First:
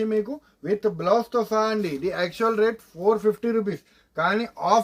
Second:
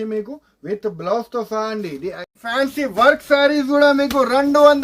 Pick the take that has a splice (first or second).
second